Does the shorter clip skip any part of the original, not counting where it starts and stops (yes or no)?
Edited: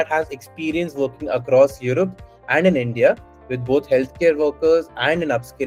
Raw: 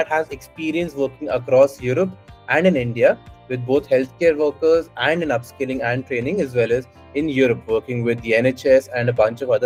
no